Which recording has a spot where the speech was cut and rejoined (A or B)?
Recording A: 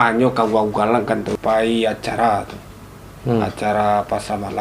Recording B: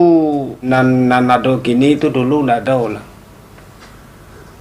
A